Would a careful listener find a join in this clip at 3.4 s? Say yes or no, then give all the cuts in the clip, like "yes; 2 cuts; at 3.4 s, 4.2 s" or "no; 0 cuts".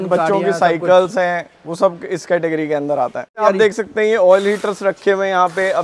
yes; 1 cut; at 3.4 s